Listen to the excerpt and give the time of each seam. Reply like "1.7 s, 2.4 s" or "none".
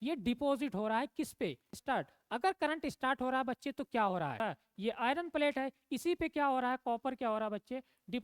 1.7 s, 4.4 s